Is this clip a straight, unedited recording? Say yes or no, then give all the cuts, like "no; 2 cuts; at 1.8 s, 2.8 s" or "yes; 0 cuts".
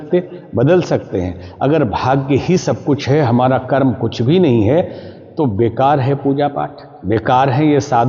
yes; 0 cuts